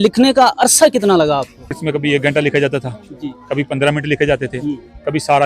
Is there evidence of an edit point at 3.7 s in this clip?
no; 1 cut; at 1.8 s

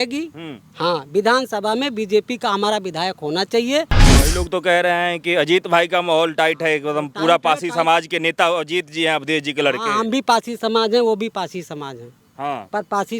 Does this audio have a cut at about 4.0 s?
yes; 1 cut; at 4.0 s

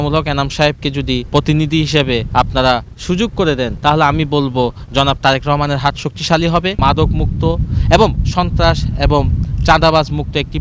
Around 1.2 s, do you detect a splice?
yes; 4 cuts; at 1.2 s, 2.3 s, 3.7 s, 6.8 s

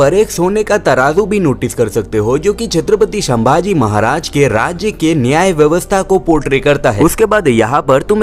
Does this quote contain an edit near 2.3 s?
no; 0 cuts

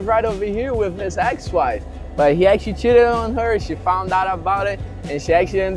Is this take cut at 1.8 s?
no; 0 cuts

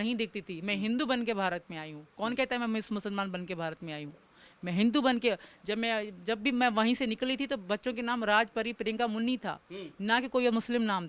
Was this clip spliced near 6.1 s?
no; 0 cuts

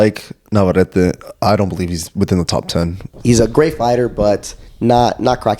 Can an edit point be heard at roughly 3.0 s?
yes; 1 cut; at 3.0 s

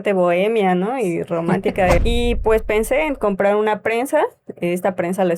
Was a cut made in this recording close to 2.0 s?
yes; 1 cut; at 2.0 s

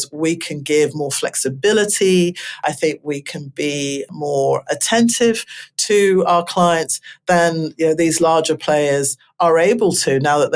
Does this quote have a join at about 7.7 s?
no; 0 cuts

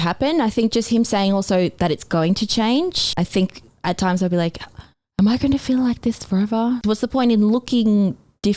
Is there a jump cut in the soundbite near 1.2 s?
no; 2 cuts; at 3.2 s, 6.8 s

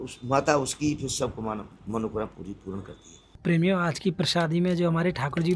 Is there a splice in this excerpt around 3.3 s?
yes; 1 cut; at 3.3 s

